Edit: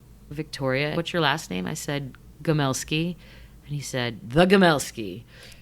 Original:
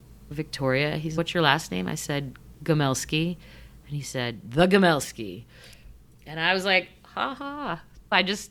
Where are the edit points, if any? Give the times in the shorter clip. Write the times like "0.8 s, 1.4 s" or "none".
0.9 s